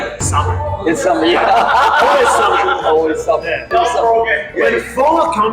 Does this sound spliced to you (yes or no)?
yes